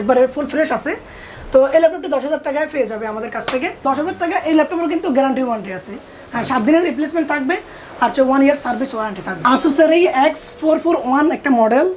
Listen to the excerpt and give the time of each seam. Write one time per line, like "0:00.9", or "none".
none